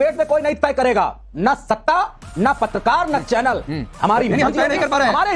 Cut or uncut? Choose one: uncut